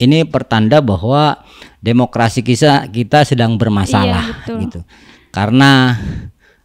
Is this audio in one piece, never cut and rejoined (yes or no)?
yes